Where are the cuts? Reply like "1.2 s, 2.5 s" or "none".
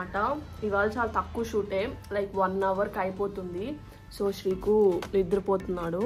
none